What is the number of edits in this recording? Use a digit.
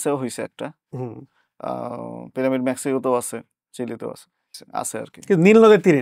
1